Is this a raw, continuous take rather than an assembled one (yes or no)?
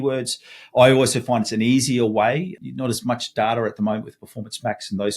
no